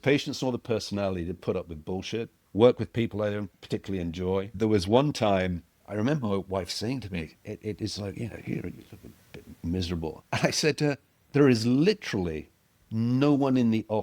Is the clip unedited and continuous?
no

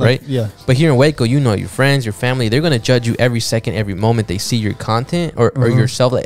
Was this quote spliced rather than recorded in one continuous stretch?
no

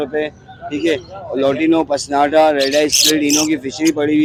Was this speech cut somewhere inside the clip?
no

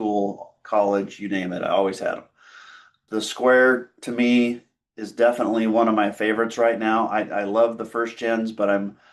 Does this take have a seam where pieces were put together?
yes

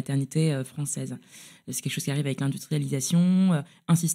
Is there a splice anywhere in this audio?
no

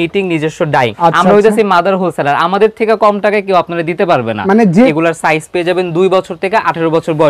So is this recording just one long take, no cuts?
no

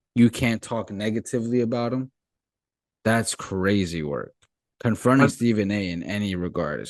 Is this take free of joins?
yes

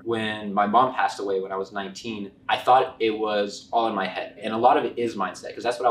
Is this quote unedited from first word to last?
no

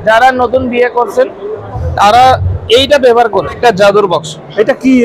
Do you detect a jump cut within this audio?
yes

